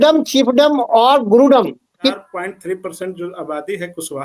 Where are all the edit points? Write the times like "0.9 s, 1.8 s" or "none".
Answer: 2.2 s